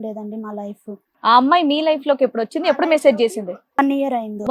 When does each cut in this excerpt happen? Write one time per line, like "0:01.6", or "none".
0:01.0